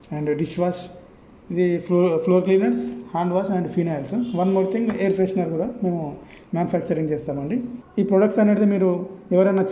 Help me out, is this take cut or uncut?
cut